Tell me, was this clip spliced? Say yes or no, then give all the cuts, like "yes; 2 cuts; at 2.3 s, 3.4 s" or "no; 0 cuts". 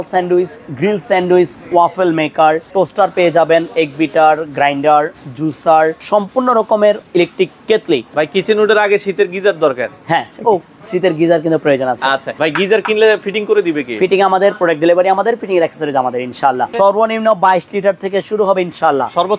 yes; 6 cuts; at 2.6 s, 6.0 s, 7.0 s, 8.1 s, 12.3 s, 16.7 s